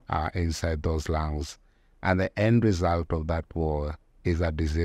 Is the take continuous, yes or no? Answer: yes